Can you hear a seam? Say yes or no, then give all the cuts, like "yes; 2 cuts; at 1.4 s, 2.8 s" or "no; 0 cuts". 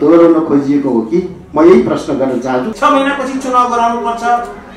yes; 1 cut; at 2.7 s